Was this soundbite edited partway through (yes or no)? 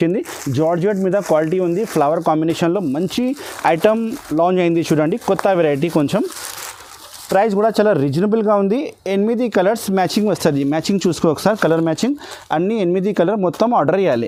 no